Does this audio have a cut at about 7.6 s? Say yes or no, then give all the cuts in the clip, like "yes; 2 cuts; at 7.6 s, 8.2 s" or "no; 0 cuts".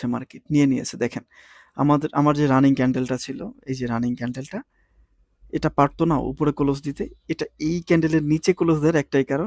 no; 0 cuts